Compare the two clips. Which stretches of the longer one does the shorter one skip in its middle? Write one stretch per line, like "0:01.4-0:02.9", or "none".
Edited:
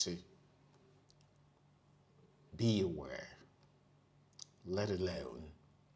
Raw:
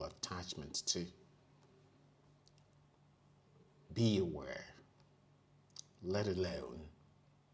0:01.9-0:02.4